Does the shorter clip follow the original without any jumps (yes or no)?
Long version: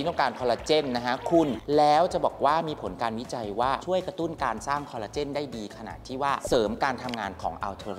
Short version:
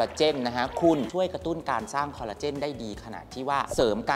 no